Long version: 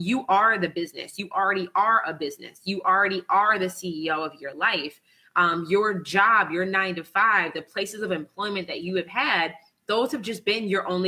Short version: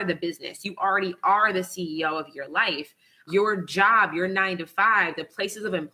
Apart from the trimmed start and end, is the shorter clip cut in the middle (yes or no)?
yes